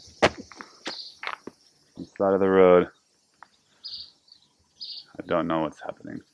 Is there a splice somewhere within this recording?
no; 0 cuts

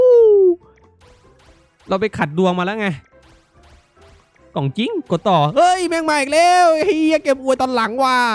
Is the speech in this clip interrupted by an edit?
no; 0 cuts

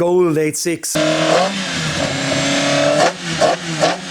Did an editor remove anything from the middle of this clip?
yes; 1 cut; at 0.9 s

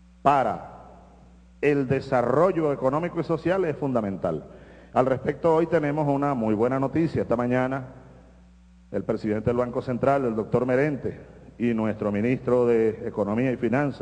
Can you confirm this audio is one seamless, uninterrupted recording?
no; 1 cut; at 6.1 s

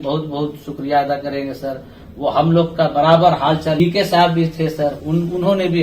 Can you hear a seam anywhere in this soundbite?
yes; 1 cut; at 3.8 s

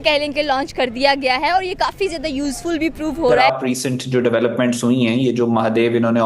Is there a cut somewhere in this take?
yes; 1 cut; at 3.4 s

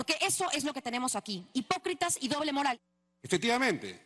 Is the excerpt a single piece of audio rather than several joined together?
no; 1 cut; at 2.8 s

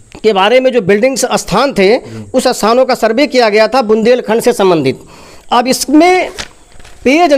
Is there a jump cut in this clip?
no; 0 cuts

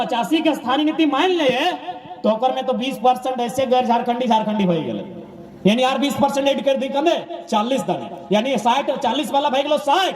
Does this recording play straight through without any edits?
yes; 0 cuts

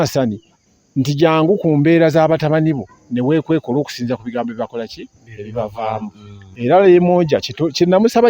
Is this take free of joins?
no; 1 cut; at 6.4 s

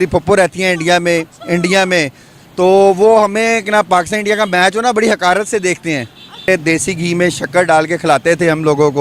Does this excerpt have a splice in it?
yes; 1 cut; at 6.5 s

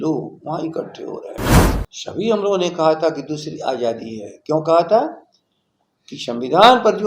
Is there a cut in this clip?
yes; 1 cut; at 1.5 s

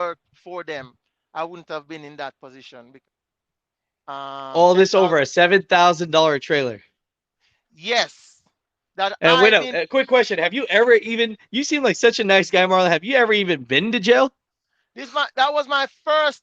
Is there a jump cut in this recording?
yes; 1 cut; at 2.8 s

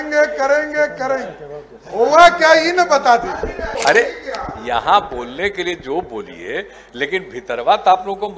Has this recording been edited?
yes; 1 cut; at 3.7 s

